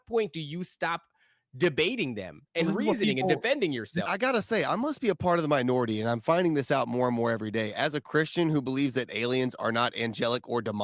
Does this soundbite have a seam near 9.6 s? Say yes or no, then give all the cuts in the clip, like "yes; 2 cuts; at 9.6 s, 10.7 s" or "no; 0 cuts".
no; 1 cut; at 4.1 s